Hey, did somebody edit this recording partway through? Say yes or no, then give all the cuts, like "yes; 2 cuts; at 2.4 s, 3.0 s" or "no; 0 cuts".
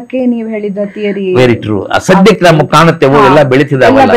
no; 0 cuts